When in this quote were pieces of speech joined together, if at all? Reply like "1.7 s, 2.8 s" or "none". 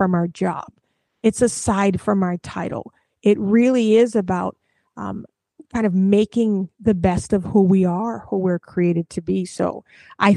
none

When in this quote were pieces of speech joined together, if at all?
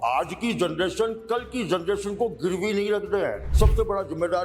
3.5 s

